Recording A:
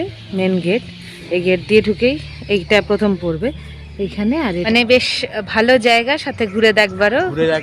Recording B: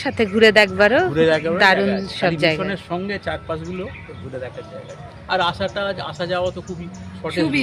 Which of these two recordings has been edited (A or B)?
A